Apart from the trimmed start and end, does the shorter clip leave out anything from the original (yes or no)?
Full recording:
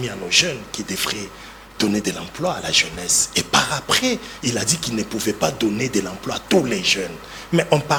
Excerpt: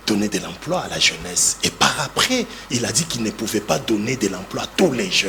no